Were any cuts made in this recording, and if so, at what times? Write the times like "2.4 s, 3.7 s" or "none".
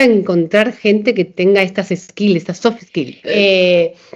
1.3 s, 3.2 s